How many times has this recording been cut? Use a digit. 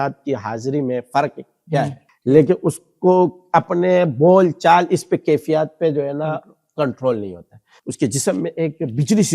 2